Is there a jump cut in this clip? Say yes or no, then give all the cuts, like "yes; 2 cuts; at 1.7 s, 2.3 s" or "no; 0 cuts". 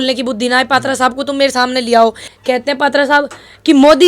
yes; 1 cut; at 2.3 s